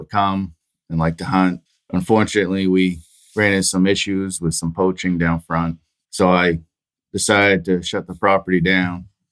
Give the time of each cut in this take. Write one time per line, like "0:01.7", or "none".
0:01.7